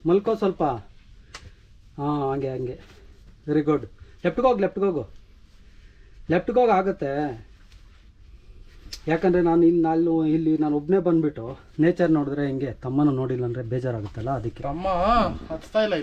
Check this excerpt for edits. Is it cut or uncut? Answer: uncut